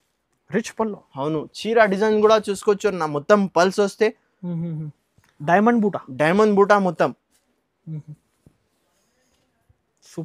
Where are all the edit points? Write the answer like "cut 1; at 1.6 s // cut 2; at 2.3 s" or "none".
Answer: none